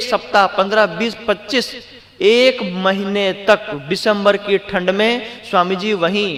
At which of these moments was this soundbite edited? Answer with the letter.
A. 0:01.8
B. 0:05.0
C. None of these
C